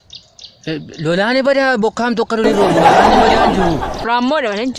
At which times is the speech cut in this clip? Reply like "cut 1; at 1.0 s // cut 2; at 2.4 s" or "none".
none

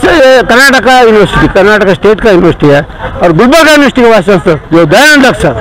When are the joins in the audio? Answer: cut 1; at 4.6 s

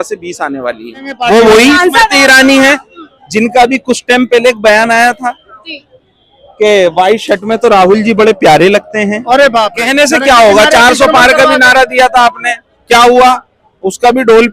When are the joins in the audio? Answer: cut 1; at 1.2 s // cut 2; at 9.8 s

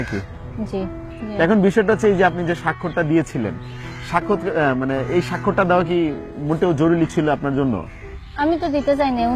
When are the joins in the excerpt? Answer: none

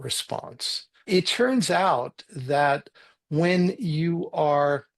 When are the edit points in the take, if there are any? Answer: cut 1; at 1.1 s // cut 2; at 3.0 s

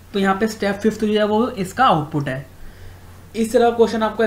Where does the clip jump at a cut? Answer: none

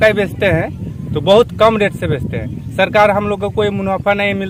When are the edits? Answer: none

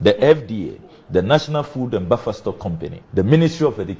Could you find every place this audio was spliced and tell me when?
cut 1; at 3.0 s

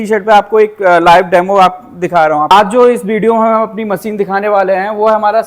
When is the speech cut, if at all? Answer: cut 1; at 2.5 s

